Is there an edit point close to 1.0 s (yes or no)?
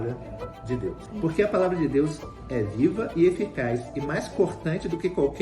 yes